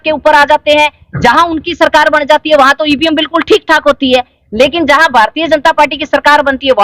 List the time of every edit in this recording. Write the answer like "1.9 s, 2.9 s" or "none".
none